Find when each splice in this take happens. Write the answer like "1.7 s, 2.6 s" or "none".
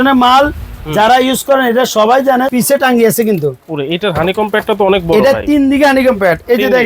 2.5 s